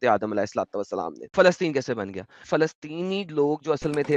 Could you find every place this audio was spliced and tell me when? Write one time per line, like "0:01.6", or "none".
0:01.3
0:02.5